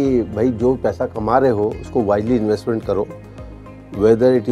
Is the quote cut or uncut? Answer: uncut